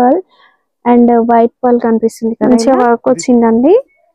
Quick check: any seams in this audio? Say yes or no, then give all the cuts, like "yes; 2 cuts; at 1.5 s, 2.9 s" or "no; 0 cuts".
yes; 1 cut; at 2.4 s